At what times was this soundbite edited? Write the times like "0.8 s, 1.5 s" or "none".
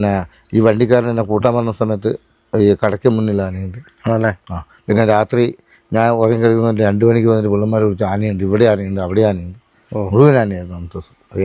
none

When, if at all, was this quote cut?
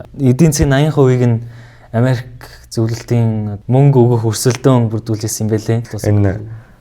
5.9 s

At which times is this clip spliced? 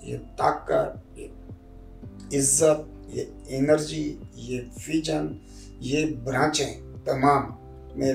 none

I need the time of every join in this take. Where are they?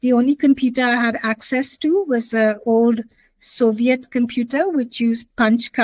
none

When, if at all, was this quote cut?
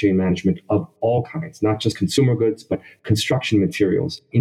none

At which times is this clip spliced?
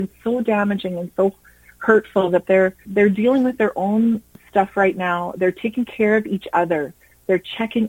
2.8 s, 4.3 s

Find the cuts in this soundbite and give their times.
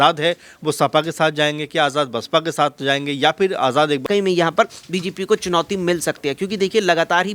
4.0 s

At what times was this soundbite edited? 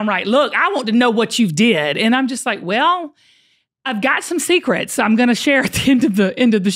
none

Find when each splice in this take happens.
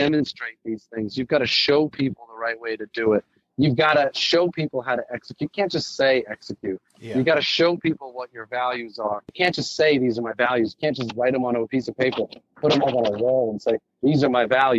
9.3 s

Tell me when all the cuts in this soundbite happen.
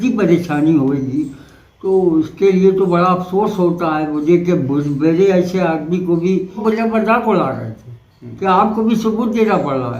6.6 s

